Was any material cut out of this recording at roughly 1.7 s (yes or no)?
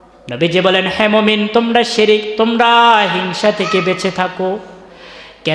yes